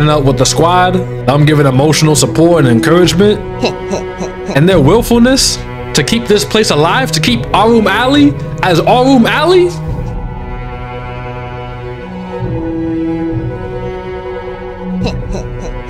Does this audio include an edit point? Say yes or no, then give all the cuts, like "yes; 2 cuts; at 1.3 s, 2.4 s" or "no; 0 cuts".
no; 0 cuts